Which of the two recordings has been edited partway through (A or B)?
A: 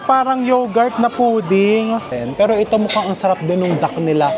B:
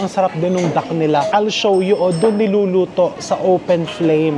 A